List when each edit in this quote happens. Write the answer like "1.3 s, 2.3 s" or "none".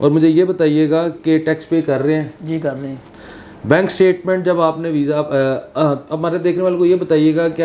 none